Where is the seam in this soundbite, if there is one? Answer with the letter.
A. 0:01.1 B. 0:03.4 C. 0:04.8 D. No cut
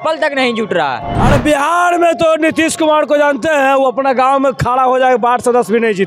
A